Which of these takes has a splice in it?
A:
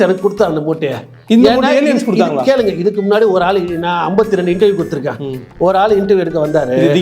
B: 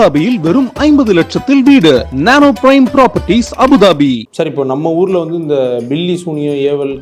B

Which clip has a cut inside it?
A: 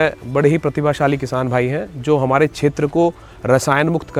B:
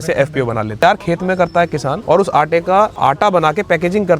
B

